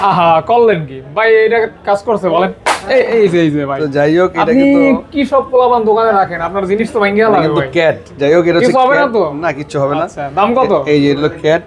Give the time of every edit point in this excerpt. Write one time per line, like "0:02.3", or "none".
none